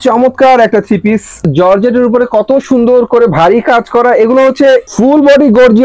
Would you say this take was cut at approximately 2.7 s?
no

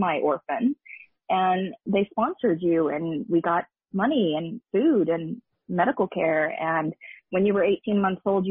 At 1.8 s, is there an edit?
yes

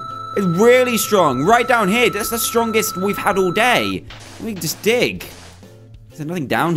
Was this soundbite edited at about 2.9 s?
yes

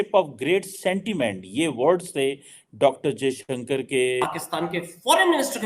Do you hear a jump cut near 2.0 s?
no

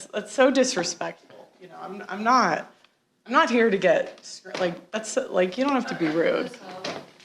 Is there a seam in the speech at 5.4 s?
no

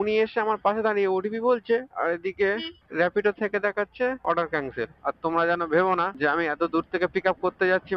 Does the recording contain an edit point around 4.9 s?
yes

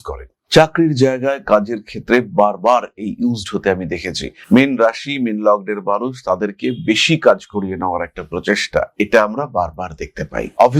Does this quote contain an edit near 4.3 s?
no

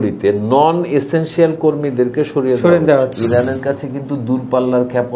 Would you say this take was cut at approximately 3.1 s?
yes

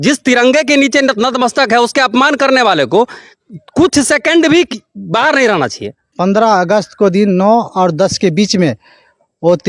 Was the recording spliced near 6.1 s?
yes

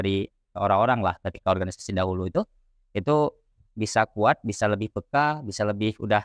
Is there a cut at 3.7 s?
no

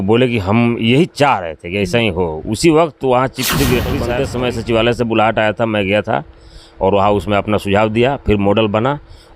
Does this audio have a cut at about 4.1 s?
yes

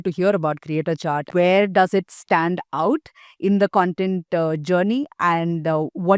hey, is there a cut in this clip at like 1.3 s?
yes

